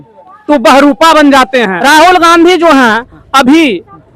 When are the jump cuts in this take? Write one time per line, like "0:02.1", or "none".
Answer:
0:01.7